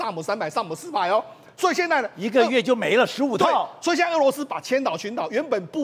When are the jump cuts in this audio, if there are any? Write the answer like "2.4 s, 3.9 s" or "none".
none